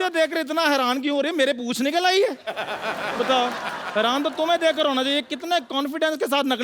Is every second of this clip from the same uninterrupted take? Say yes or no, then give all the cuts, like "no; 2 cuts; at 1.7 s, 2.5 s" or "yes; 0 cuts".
yes; 0 cuts